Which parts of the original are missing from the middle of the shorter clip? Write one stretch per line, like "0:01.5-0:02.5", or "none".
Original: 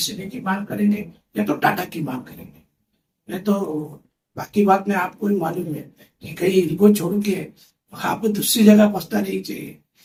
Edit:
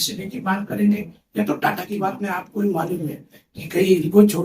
0:01.9-0:04.6